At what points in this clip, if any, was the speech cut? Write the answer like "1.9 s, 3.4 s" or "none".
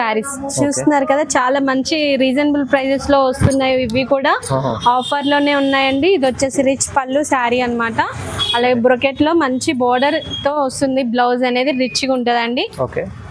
none